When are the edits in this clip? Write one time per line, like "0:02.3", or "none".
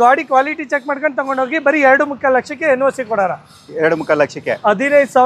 none